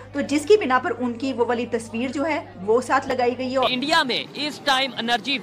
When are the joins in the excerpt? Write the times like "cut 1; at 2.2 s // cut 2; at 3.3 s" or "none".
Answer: cut 1; at 3.7 s